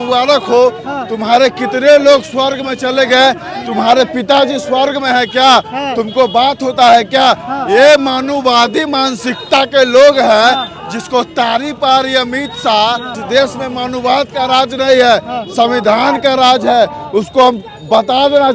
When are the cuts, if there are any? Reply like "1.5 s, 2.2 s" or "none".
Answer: none